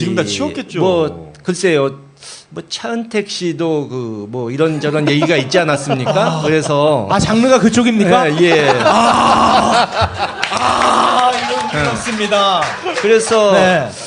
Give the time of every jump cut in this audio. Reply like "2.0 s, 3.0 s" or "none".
none